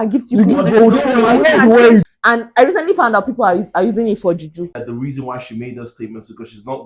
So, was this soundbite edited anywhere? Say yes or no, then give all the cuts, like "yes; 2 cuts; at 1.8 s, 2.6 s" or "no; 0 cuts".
yes; 2 cuts; at 2.1 s, 4.8 s